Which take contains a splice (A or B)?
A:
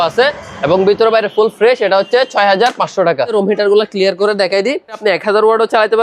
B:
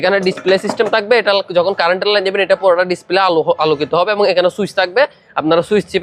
A